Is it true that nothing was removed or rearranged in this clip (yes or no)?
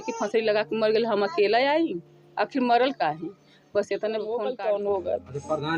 no